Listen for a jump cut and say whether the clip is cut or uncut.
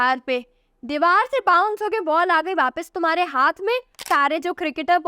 cut